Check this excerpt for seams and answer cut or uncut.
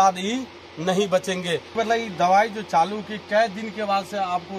cut